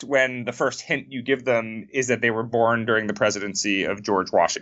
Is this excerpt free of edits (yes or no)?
yes